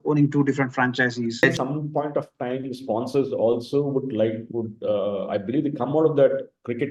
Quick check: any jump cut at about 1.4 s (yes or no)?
yes